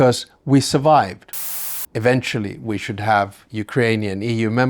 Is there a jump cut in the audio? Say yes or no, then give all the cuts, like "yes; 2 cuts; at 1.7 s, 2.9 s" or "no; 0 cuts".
yes; 1 cut; at 1.4 s